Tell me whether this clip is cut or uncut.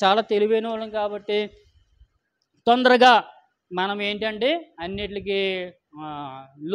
uncut